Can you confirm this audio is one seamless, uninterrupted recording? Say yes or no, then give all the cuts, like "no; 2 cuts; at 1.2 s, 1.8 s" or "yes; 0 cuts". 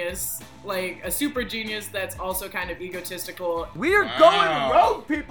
no; 1 cut; at 3.7 s